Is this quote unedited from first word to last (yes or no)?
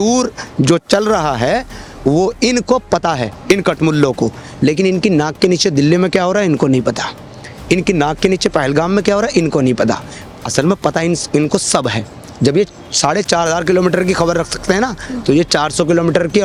yes